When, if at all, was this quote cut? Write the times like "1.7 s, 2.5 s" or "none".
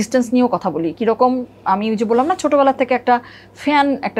none